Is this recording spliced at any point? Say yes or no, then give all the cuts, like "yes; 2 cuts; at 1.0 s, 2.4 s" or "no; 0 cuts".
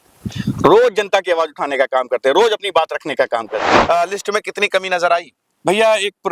yes; 1 cut; at 3.7 s